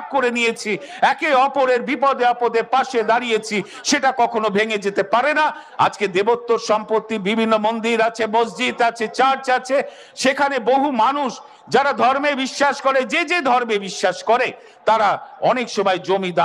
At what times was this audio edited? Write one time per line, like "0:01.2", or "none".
0:05.6